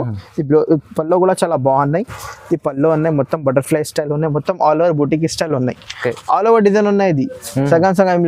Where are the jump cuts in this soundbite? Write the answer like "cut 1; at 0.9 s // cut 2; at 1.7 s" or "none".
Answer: none